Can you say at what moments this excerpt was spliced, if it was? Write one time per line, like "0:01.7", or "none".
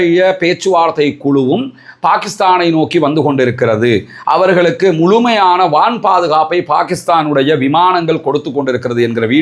none